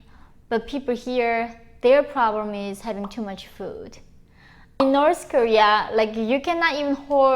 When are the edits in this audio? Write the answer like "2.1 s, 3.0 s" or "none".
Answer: 4.8 s